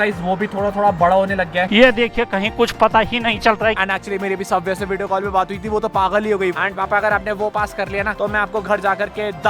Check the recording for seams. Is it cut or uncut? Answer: cut